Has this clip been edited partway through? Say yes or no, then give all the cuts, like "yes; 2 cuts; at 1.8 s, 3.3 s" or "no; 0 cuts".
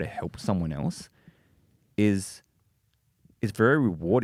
no; 0 cuts